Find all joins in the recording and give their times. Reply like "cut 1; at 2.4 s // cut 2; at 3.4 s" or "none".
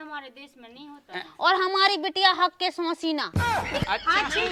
none